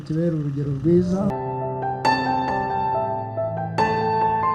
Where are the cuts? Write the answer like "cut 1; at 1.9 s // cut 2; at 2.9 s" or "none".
none